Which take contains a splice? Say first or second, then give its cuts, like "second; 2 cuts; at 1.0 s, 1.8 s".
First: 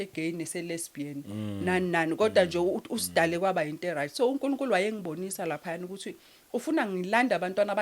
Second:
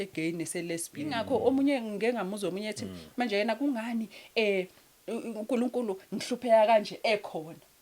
second; 1 cut; at 1.2 s